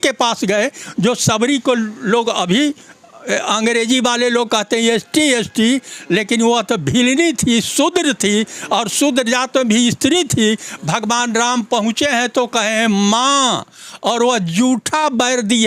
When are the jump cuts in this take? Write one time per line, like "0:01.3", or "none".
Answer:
none